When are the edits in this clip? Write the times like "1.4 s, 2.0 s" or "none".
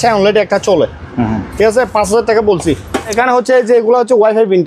3.1 s